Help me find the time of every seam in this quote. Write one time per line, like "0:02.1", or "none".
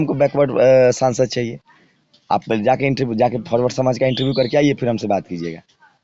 none